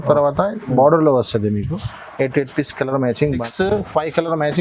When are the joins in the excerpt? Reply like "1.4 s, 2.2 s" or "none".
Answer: 3.4 s